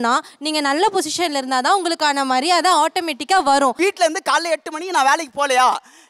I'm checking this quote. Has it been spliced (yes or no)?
no